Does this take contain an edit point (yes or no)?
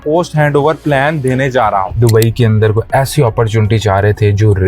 yes